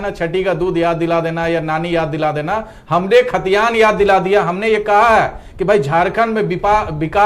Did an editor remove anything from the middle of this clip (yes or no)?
no